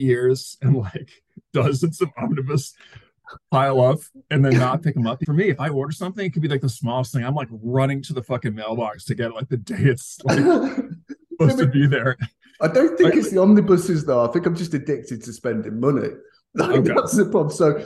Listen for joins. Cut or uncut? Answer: cut